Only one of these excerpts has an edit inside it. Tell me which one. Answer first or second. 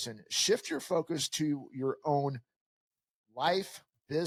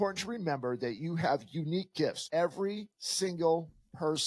second